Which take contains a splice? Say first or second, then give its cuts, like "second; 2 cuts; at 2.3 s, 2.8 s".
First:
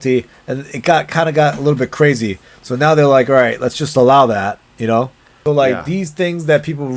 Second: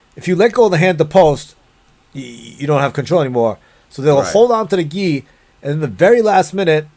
first; 1 cut; at 5.2 s